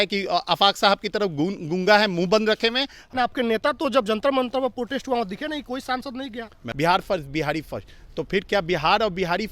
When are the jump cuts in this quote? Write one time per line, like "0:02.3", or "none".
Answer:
0:03.0
0:06.7